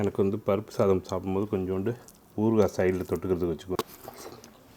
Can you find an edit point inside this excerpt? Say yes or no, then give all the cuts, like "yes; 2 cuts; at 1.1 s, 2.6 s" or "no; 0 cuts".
yes; 1 cut; at 3.8 s